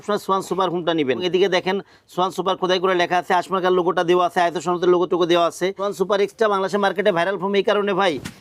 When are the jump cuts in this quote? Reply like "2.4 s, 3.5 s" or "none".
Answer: 1.2 s, 5.8 s